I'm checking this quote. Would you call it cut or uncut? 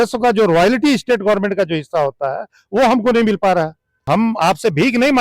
cut